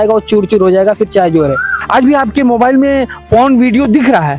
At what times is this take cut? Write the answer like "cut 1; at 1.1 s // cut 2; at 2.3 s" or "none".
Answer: cut 1; at 1.8 s